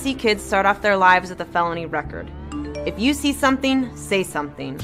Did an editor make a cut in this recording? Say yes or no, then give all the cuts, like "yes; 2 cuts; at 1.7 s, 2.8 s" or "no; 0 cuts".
no; 0 cuts